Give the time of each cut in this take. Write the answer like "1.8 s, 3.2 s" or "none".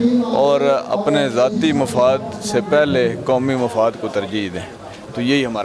1.3 s